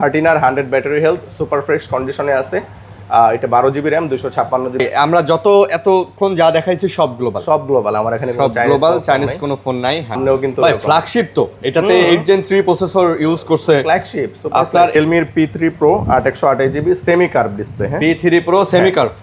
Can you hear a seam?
yes; 3 cuts; at 4.8 s, 10.2 s, 14.9 s

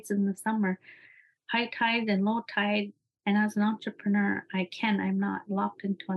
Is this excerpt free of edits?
no; 1 cut; at 2.9 s

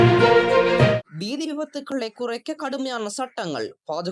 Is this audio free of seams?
no; 1 cut; at 1.0 s

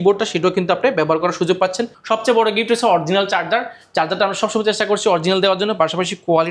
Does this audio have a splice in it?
yes; 1 cut; at 1.9 s

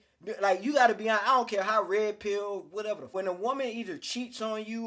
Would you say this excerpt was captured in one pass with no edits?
no; 1 cut; at 3.1 s

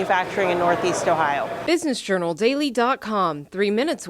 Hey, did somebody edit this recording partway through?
yes; 1 cut; at 1.6 s

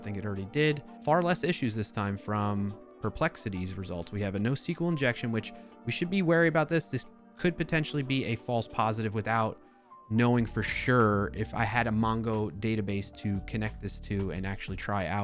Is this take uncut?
yes; 0 cuts

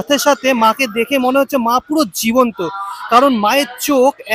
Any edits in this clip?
no; 0 cuts

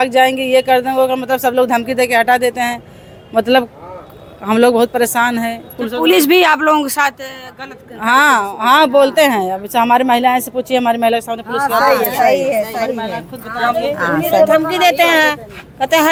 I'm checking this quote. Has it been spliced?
no; 0 cuts

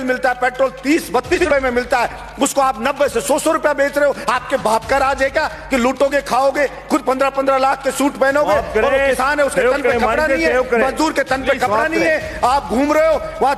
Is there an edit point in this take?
yes; 1 cut; at 1.4 s

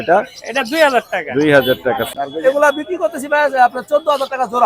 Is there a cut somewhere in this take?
yes; 1 cut; at 2.1 s

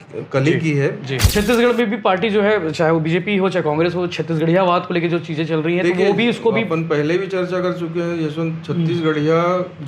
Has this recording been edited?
yes; 1 cut; at 1.3 s

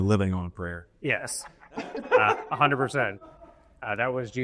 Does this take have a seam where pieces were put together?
no; 0 cuts

